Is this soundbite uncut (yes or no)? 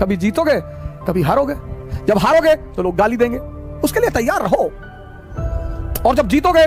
yes